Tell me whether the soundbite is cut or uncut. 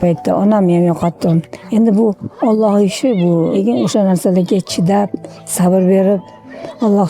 cut